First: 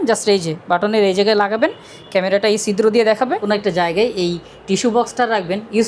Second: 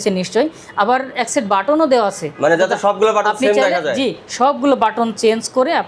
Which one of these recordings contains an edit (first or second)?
first